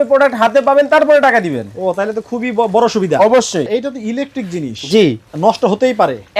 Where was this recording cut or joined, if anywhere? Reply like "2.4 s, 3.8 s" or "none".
3.7 s